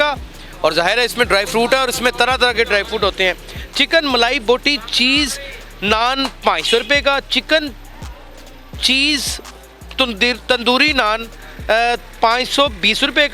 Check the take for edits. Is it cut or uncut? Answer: uncut